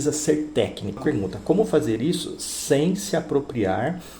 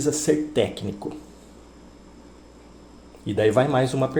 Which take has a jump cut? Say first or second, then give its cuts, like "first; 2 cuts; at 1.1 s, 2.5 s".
first; 1 cut; at 1.0 s